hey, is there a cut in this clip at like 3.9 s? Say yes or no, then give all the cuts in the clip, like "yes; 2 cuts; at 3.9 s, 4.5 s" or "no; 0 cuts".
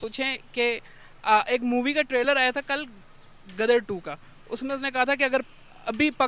no; 0 cuts